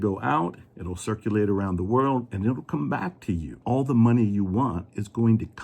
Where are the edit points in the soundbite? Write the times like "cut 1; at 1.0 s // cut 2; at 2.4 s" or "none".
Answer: cut 1; at 3.5 s